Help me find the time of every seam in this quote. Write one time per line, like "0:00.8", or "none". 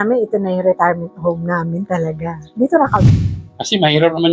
0:03.2